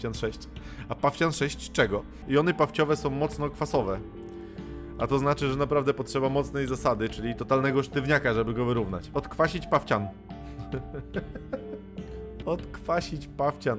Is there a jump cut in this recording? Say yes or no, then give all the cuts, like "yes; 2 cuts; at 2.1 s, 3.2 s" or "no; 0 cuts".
yes; 3 cuts; at 2.2 s, 9.0 s, 12.4 s